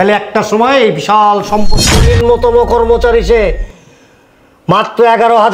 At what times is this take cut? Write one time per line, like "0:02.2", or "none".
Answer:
0:02.0